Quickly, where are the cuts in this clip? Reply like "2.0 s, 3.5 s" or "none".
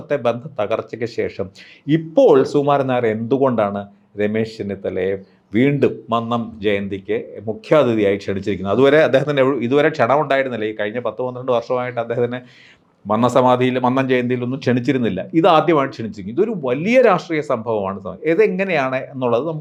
none